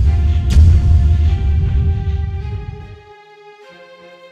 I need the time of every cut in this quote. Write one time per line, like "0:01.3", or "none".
none